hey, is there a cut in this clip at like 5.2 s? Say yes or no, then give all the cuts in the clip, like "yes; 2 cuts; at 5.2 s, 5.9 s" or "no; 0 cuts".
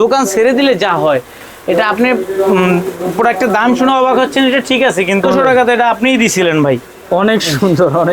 yes; 1 cut; at 5.2 s